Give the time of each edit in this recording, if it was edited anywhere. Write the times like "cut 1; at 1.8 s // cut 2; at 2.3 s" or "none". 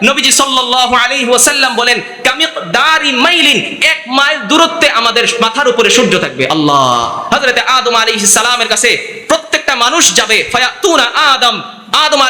cut 1; at 7.2 s